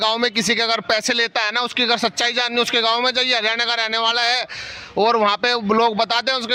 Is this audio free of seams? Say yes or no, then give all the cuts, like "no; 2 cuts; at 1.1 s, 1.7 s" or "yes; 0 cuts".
yes; 0 cuts